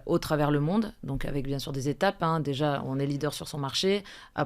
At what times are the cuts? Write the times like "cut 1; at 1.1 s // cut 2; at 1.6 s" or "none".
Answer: none